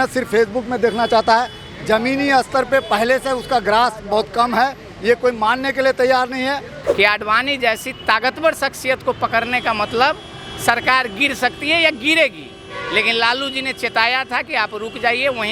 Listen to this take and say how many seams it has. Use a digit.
1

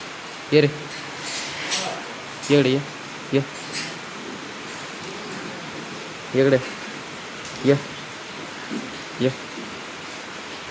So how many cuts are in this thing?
0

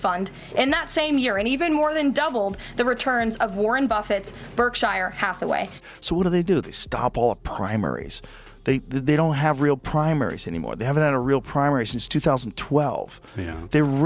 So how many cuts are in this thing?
1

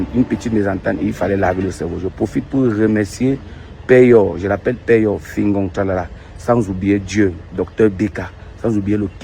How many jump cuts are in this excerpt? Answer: 1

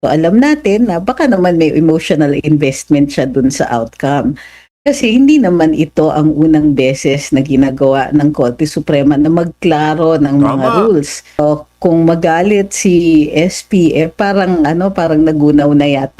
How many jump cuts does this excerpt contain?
1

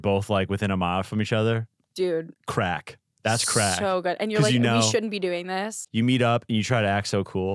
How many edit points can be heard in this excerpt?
2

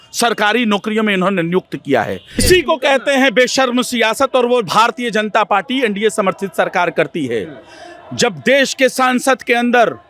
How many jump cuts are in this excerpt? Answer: 1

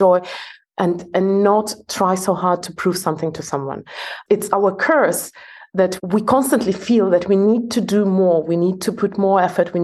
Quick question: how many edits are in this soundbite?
2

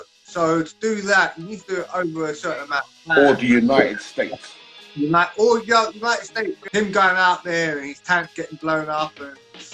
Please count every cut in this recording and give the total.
1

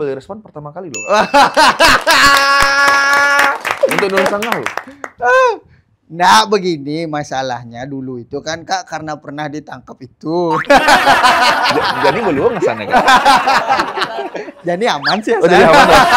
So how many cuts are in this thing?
0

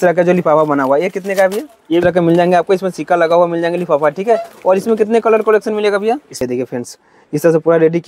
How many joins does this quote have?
2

